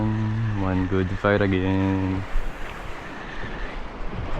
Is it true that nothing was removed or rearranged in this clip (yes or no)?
no